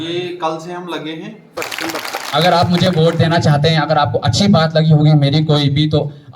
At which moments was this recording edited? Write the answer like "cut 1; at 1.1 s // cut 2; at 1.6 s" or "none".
cut 1; at 1.8 s